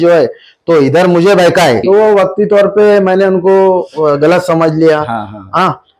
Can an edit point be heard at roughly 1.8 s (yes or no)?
yes